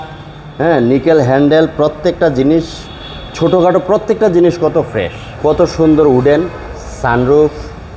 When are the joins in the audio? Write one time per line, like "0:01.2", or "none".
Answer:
0:05.3